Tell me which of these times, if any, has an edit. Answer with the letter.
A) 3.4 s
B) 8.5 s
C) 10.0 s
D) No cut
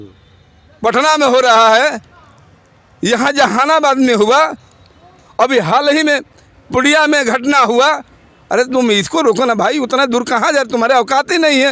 D